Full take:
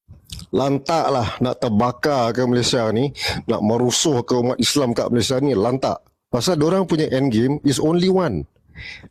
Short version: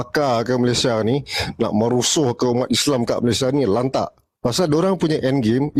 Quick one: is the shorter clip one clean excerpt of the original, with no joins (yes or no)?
yes